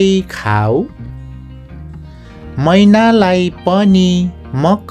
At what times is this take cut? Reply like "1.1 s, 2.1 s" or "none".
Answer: none